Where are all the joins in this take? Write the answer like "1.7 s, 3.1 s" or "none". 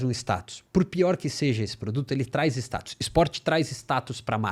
none